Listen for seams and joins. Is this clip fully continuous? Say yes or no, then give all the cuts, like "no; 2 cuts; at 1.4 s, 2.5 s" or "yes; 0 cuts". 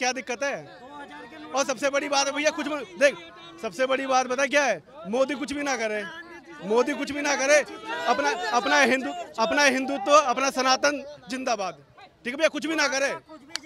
yes; 0 cuts